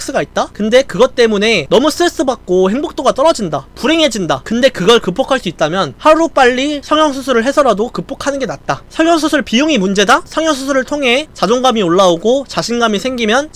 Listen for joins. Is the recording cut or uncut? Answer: uncut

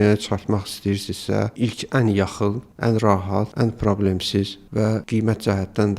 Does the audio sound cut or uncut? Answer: cut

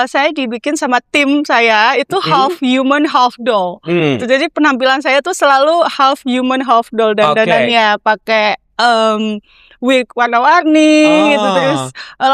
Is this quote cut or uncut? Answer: uncut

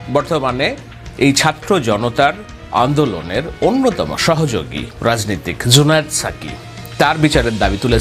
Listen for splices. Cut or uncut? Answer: uncut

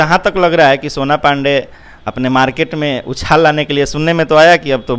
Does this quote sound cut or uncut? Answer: uncut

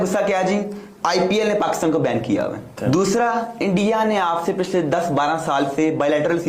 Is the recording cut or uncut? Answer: cut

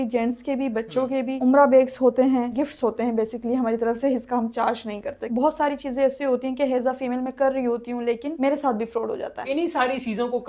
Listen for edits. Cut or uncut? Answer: cut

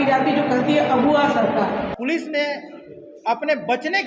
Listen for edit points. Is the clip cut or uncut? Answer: cut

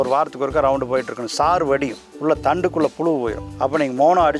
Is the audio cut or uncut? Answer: cut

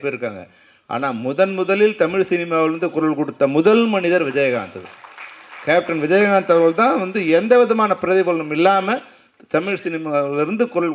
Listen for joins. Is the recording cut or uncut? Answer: uncut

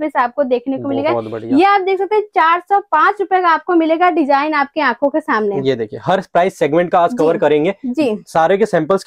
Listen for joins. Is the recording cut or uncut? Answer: uncut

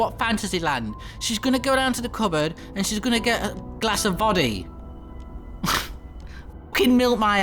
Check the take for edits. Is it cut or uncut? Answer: cut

